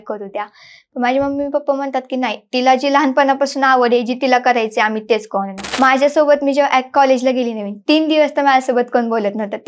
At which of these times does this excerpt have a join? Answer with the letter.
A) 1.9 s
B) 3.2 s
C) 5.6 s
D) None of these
C